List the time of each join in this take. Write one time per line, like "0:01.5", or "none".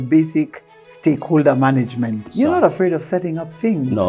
0:02.2